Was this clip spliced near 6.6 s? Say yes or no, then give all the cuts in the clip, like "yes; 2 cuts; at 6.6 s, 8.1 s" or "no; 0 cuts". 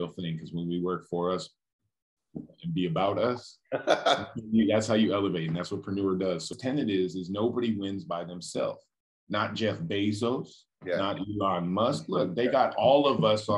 yes; 1 cut; at 6.6 s